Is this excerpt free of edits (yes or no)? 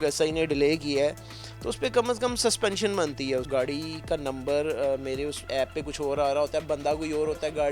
no